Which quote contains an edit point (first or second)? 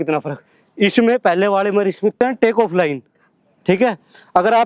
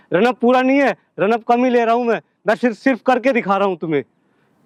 first